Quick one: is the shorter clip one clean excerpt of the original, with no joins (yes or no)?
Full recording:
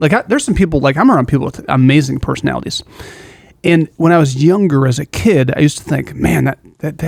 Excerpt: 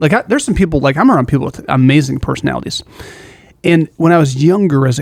yes